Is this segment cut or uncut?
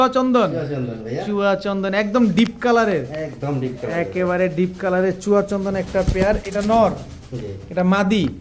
uncut